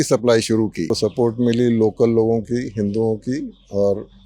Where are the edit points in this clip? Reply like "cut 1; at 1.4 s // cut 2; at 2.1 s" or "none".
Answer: cut 1; at 0.9 s